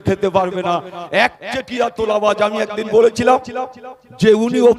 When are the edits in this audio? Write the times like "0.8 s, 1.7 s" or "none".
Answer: none